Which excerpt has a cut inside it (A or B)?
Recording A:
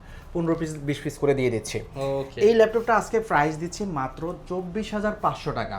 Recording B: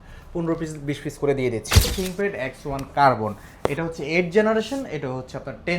B